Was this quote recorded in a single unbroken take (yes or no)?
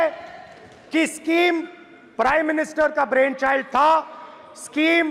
yes